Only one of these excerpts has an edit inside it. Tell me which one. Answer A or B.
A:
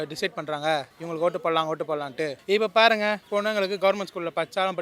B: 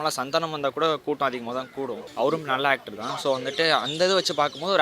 B